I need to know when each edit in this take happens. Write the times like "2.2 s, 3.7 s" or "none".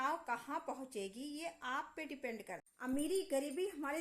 2.7 s

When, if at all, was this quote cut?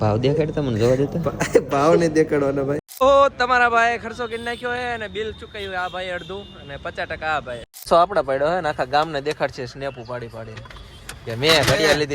2.9 s, 7.7 s

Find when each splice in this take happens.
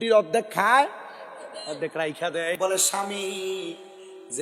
2.6 s

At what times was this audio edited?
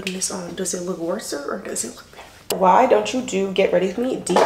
2.4 s

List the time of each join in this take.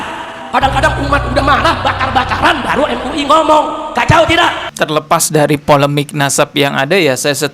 4.7 s

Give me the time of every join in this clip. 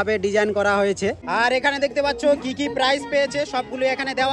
1.2 s

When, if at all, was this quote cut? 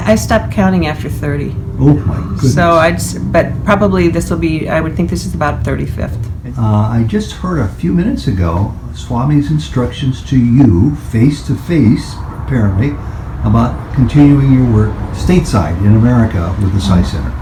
none

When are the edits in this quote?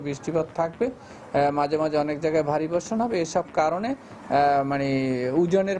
none

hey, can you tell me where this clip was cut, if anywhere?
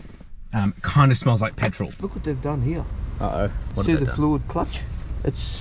1.9 s, 3.6 s

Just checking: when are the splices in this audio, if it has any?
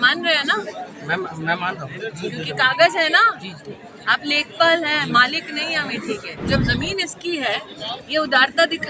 6.3 s

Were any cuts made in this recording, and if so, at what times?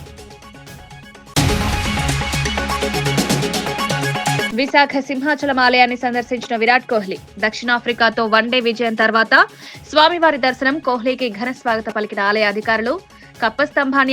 1.2 s, 4.3 s

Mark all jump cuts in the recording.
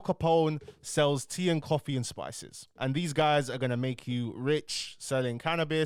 none

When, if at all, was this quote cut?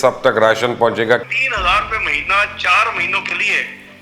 1.2 s

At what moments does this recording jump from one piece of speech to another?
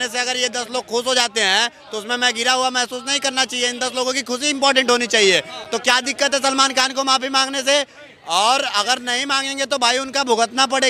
none

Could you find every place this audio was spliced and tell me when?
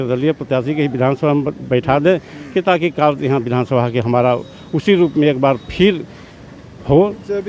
none

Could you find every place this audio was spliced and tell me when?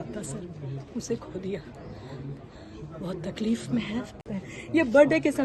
4.1 s

